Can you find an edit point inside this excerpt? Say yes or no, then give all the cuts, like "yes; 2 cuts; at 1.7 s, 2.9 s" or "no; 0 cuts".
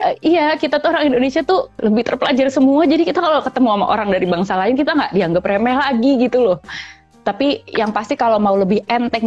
yes; 2 cuts; at 1.7 s, 7.0 s